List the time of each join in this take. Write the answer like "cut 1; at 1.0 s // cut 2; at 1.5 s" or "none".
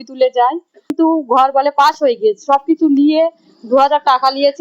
cut 1; at 0.9 s